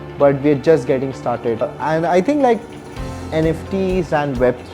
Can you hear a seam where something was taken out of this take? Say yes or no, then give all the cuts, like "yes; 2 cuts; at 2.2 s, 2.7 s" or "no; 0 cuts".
yes; 1 cut; at 1.7 s